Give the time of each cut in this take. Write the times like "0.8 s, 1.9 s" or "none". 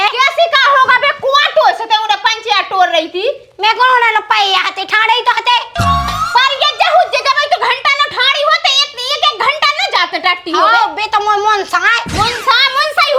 none